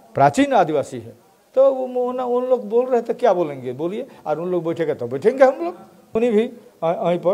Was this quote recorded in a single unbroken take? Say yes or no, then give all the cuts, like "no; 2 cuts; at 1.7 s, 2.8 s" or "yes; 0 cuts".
no; 1 cut; at 6.1 s